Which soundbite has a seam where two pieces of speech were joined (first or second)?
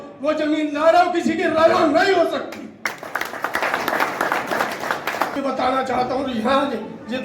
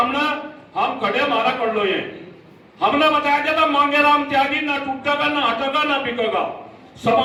first